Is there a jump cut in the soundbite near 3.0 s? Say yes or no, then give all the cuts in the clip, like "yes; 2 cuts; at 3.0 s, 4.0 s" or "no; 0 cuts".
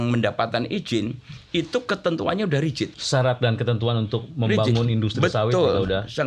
yes; 1 cut; at 3.0 s